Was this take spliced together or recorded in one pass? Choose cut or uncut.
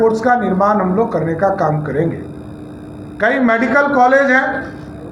uncut